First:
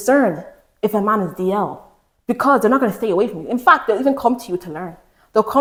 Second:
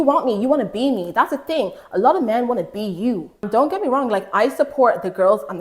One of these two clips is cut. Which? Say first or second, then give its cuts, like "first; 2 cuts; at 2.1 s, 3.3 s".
second; 1 cut; at 3.4 s